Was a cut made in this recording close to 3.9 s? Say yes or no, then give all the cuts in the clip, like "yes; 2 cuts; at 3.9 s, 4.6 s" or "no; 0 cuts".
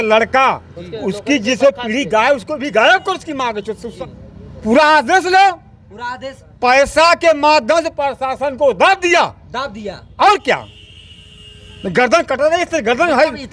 yes; 1 cut; at 3.9 s